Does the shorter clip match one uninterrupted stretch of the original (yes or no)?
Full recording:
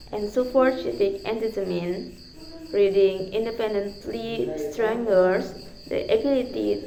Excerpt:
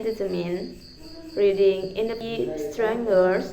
no